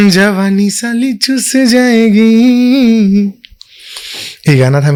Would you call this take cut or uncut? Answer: uncut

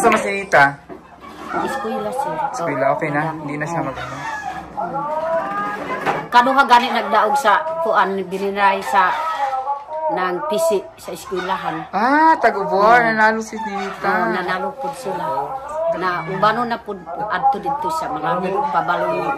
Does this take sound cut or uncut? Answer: uncut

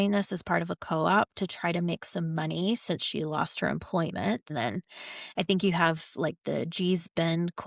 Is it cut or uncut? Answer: cut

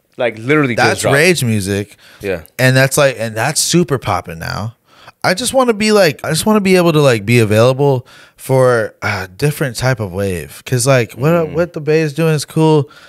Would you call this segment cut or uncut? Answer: cut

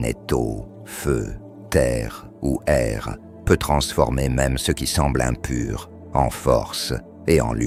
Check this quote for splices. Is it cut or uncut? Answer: uncut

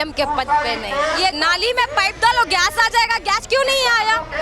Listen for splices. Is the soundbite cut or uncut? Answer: cut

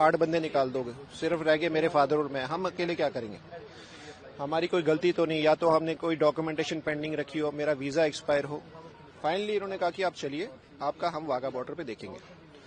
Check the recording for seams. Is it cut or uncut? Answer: uncut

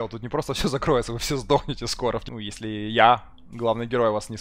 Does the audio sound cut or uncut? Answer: cut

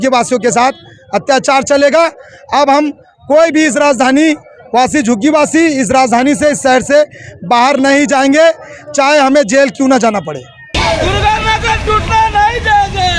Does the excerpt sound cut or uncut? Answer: cut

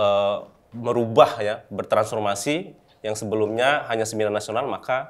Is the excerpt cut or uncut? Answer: uncut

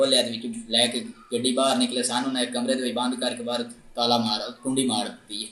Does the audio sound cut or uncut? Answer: uncut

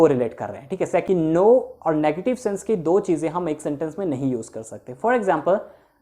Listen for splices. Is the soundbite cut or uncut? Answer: cut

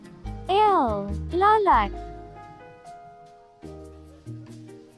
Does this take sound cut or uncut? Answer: cut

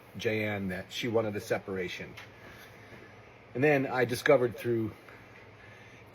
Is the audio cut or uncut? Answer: cut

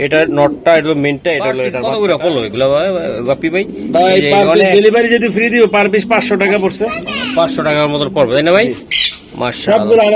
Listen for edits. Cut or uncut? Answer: cut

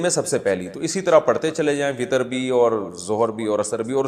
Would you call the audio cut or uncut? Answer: uncut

